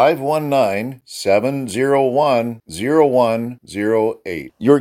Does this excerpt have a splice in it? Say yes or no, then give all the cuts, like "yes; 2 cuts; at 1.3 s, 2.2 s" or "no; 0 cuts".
no; 0 cuts